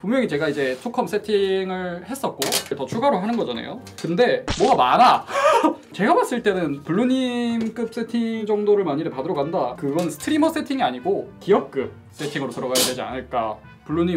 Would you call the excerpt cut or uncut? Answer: cut